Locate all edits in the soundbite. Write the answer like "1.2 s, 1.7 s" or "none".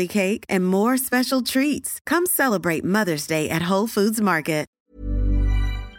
4.8 s